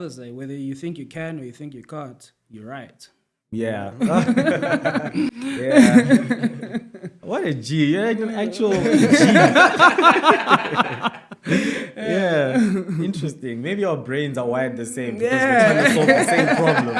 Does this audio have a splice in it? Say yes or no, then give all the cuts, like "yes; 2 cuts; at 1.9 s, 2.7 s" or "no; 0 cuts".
no; 0 cuts